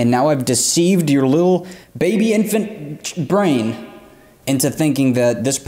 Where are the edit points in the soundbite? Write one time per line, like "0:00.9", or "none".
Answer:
none

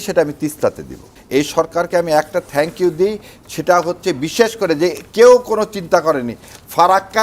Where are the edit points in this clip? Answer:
0:01.1

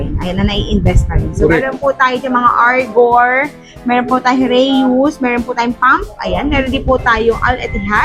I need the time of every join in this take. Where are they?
none

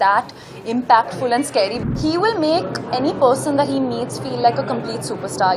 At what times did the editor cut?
0:01.8

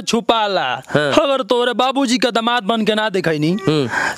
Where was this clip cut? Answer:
none

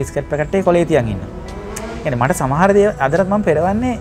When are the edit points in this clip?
none

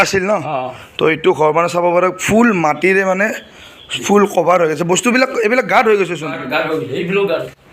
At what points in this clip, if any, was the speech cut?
none

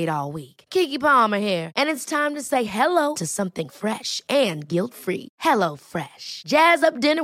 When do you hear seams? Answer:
none

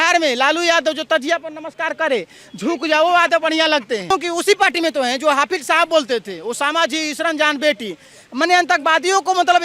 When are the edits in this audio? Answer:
0:04.1

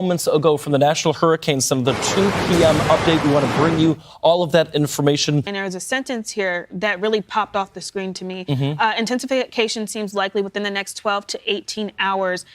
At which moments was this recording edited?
0:05.5

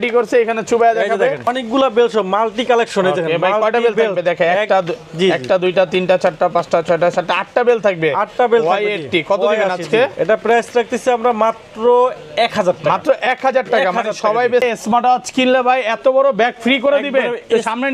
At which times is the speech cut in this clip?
0:01.5
0:14.6

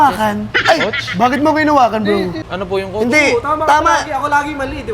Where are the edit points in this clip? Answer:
0:02.4

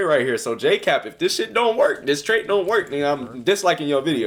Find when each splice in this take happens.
none

